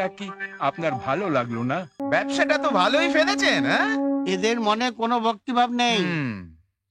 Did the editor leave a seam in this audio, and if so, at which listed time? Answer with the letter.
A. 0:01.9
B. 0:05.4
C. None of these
A